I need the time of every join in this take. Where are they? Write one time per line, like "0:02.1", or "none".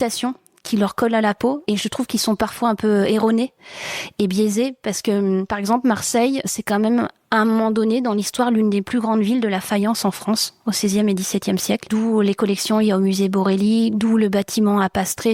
0:01.6